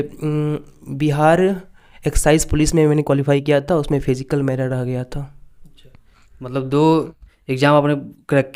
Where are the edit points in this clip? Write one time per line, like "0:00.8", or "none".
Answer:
none